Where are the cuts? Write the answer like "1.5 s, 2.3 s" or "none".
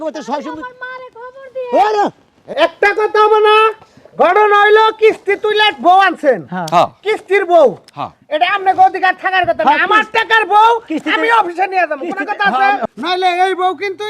2.4 s, 12.8 s